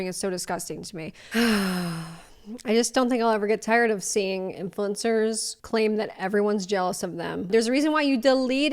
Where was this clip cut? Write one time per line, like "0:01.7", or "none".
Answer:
0:01.3
0:04.0
0:07.5